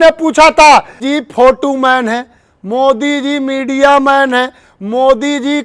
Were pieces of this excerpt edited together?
yes; 1 cut; at 1.0 s

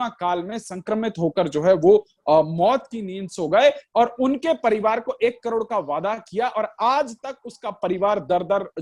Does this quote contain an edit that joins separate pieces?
no; 0 cuts

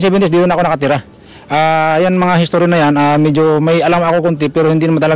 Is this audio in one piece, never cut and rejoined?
yes; 0 cuts

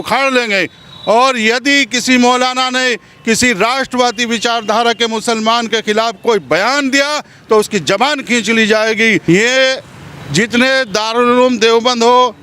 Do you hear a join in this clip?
yes; 1 cut; at 9.2 s

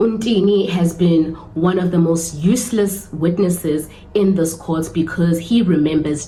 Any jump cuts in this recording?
no; 0 cuts

